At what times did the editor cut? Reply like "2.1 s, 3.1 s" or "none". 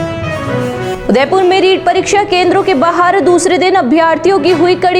0.9 s